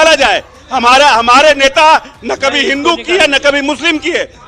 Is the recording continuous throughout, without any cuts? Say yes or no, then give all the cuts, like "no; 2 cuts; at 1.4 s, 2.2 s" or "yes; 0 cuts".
yes; 0 cuts